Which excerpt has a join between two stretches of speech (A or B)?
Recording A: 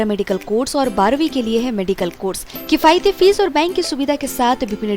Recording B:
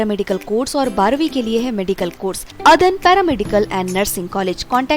B